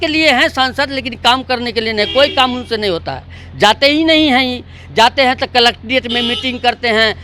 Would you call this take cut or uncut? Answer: uncut